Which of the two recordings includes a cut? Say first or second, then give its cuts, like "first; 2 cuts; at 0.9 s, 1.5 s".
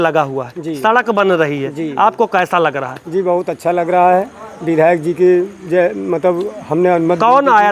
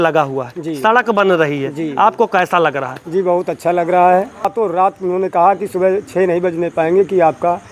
second; 1 cut; at 4.5 s